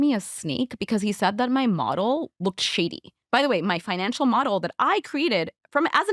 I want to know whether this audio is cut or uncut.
cut